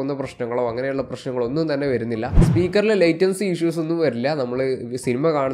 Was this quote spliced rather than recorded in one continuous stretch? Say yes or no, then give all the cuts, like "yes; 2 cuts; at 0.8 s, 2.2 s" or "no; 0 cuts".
yes; 1 cut; at 2.3 s